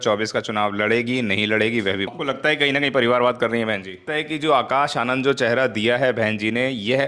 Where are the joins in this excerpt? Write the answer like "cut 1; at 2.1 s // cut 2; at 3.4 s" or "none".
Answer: cut 1; at 2.1 s // cut 2; at 4.0 s